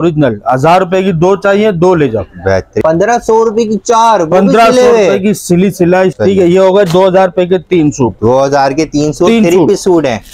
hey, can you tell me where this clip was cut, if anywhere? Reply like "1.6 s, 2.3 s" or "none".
2.7 s, 6.2 s